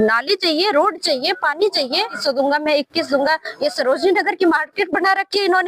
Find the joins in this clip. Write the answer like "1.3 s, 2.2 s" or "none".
2.2 s